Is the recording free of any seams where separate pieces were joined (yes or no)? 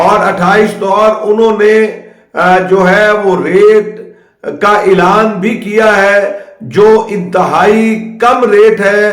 no